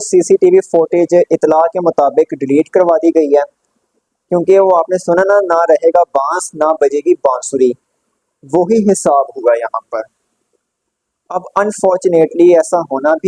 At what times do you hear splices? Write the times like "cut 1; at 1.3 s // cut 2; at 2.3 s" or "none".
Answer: none